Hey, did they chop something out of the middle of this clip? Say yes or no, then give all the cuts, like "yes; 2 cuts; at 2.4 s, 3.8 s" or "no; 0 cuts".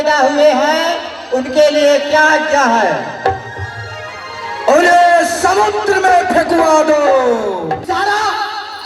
yes; 1 cut; at 7.8 s